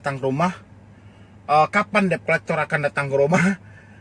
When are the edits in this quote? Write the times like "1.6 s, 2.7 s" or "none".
none

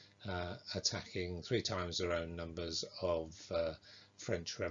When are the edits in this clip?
2.5 s

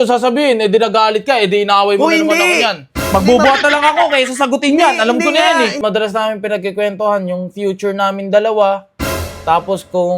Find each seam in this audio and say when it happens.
5.8 s

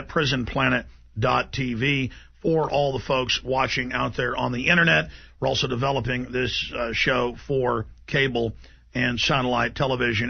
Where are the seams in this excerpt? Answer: none

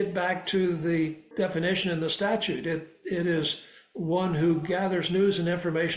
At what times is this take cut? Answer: 1.2 s

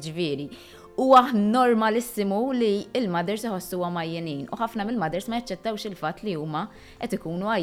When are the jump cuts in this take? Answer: none

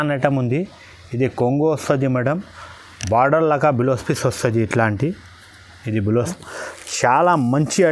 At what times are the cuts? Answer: 6.3 s

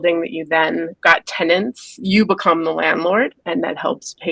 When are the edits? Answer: 0.9 s, 3.4 s

